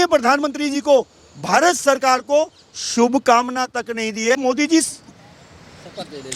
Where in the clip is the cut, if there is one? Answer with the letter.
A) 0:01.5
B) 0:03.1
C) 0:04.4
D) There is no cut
C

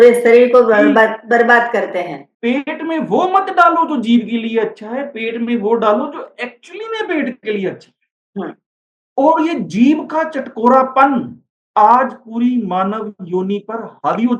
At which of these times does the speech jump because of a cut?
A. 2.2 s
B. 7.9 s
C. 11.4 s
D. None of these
A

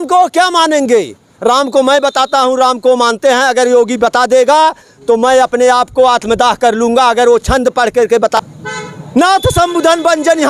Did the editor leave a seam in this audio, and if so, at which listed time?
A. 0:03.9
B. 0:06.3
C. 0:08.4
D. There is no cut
C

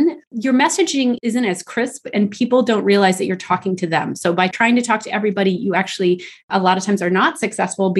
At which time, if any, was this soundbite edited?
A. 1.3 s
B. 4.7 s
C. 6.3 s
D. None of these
D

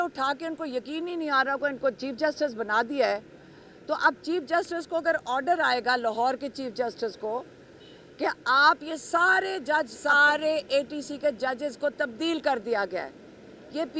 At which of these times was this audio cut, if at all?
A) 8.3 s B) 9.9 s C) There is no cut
B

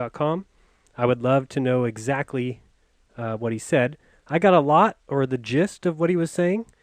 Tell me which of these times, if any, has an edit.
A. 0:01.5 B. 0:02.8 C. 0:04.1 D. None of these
A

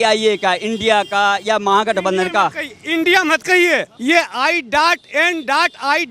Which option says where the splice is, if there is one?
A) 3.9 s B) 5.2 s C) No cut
A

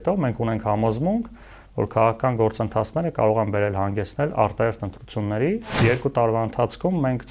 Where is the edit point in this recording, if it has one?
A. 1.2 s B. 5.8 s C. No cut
B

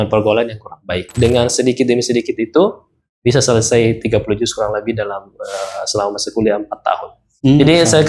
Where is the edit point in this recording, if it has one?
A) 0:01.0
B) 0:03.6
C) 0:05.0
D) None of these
A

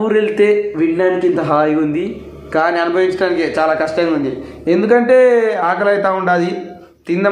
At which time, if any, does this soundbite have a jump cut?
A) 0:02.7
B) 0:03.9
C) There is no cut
C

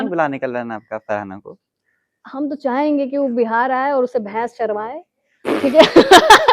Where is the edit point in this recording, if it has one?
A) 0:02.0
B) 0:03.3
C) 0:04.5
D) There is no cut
D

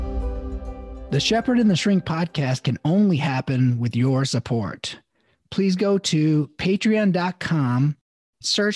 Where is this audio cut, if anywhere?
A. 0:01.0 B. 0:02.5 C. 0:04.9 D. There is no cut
A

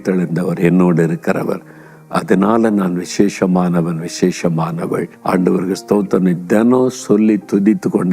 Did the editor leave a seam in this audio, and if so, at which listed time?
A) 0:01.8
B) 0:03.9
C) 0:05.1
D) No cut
C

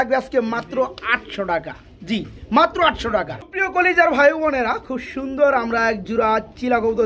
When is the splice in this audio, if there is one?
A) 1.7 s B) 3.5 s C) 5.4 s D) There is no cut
D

